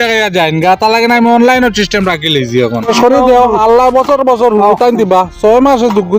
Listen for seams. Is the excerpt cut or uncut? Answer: cut